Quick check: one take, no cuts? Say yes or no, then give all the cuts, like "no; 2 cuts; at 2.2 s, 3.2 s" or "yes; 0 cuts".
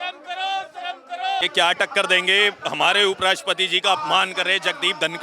no; 1 cut; at 1.4 s